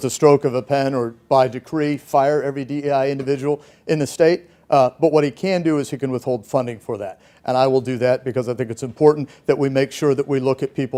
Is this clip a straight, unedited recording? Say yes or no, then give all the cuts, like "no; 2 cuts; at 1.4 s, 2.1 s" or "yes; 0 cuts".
yes; 0 cuts